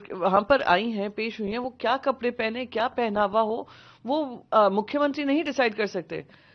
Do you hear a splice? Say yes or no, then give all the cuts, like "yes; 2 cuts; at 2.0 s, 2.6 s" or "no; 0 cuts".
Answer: no; 0 cuts